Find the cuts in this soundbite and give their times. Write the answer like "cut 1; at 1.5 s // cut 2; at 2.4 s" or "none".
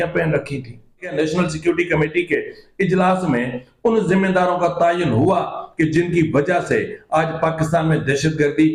cut 1; at 1.1 s